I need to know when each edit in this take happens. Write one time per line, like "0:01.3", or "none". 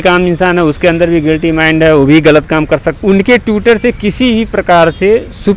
0:02.9